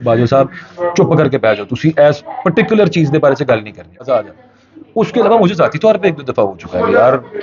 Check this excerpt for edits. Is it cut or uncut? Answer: cut